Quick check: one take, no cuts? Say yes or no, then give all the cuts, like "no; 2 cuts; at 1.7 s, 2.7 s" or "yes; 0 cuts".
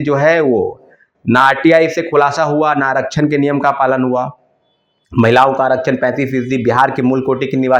yes; 0 cuts